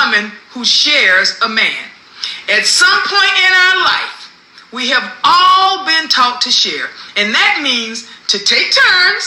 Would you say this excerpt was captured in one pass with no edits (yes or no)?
yes